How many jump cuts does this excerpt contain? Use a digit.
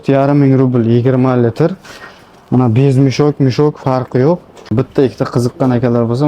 1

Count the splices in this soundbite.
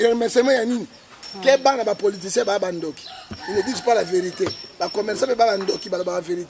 1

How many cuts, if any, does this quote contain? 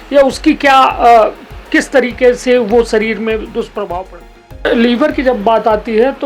1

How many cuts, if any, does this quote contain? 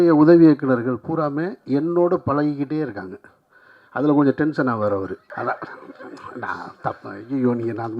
1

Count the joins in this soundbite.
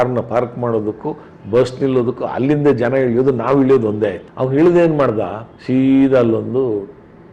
0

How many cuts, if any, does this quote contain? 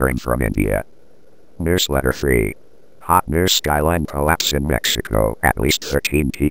1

